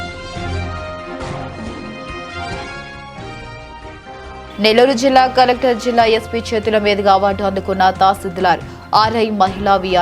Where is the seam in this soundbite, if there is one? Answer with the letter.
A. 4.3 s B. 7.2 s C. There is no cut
A